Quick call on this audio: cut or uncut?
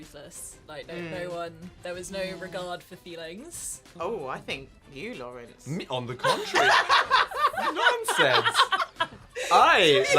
cut